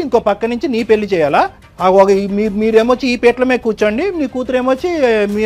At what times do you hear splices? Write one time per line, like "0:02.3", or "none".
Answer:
0:01.6